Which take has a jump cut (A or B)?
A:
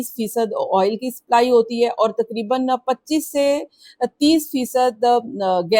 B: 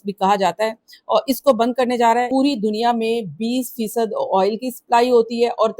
B